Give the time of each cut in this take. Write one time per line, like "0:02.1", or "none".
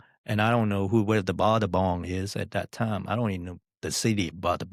none